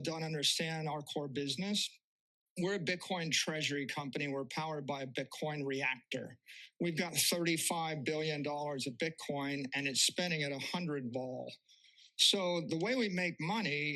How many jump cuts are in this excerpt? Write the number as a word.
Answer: zero